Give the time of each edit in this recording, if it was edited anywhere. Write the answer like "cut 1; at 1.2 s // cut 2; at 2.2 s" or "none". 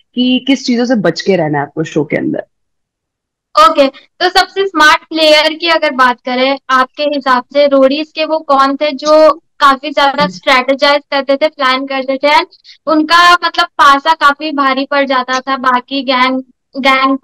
none